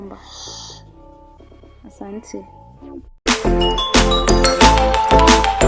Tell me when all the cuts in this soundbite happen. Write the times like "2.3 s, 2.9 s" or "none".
3.3 s